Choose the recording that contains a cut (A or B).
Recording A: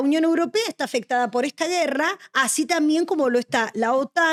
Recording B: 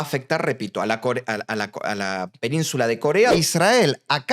B